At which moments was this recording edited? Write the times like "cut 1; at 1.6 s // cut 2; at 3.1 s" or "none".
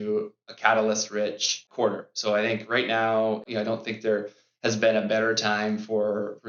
none

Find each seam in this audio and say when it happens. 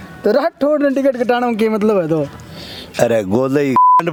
none

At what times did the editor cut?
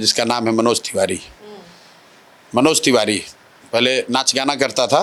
none

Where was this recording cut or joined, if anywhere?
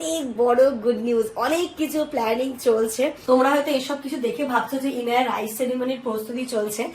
cut 1; at 3.2 s

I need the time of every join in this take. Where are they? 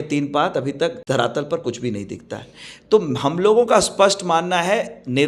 cut 1; at 1.0 s

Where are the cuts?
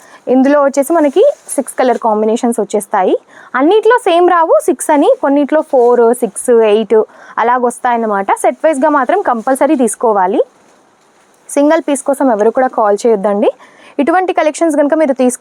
none

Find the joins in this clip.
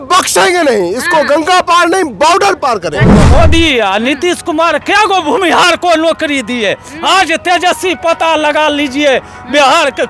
cut 1; at 3.2 s

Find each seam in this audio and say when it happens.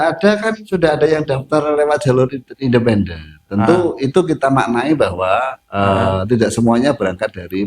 none

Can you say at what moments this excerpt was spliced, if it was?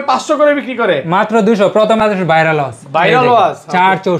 cut 1; at 2.1 s

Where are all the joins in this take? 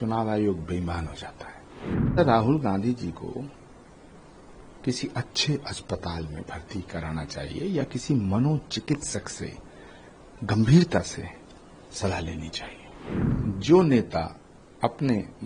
cut 1; at 2.2 s // cut 2; at 13.3 s

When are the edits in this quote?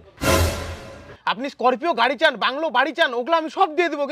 cut 1; at 1.2 s

